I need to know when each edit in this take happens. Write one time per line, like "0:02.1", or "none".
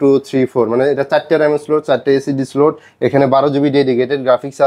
none